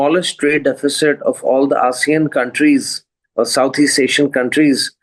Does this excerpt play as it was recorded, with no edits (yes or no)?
yes